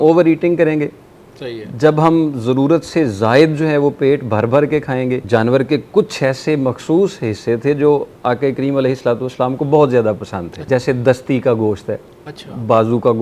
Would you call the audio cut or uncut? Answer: cut